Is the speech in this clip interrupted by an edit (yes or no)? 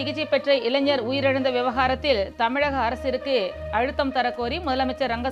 no